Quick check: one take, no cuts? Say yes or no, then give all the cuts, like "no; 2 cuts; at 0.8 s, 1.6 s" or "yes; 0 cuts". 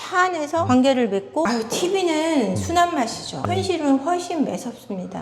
no; 2 cuts; at 1.5 s, 3.4 s